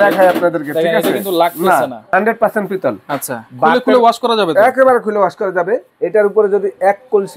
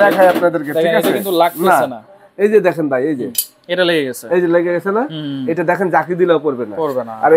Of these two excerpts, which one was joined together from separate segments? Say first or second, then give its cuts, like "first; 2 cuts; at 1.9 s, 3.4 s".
first; 2 cuts; at 2.0 s, 5.9 s